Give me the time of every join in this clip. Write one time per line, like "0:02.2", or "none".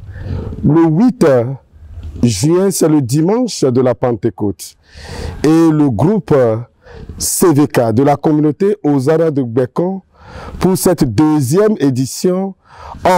none